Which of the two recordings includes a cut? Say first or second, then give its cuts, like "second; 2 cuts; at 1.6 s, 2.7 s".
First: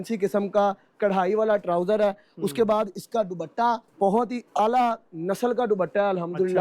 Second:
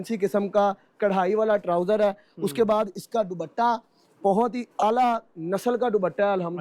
first; 1 cut; at 3.9 s